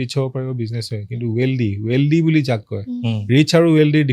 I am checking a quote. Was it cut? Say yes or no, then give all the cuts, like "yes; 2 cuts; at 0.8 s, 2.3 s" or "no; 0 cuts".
no; 0 cuts